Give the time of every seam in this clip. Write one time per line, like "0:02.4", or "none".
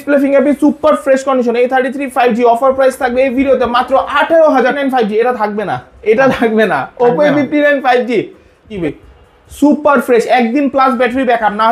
0:04.8
0:08.8